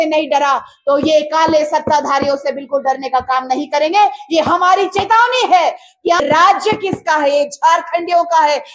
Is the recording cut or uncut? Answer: cut